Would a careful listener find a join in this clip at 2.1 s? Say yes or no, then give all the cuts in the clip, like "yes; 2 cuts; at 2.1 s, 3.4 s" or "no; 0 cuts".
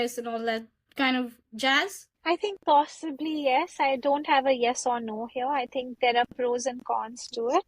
yes; 1 cut; at 2.1 s